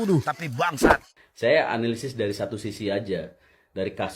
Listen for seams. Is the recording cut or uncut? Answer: cut